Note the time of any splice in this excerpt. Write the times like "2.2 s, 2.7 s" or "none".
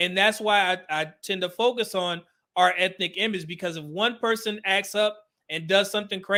none